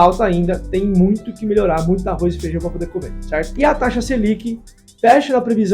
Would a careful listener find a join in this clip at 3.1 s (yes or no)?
no